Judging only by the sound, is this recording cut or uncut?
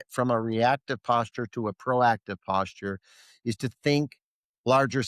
uncut